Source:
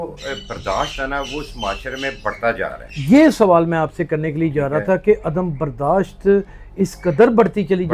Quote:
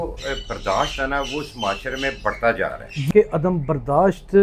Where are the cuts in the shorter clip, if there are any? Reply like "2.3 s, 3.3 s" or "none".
3.1 s